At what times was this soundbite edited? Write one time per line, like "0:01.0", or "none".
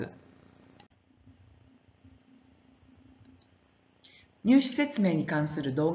0:04.0